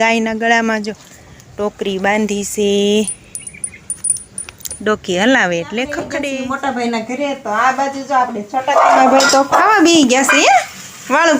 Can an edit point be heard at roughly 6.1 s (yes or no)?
yes